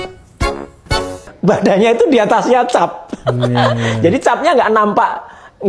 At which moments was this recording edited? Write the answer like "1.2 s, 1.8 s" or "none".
1.3 s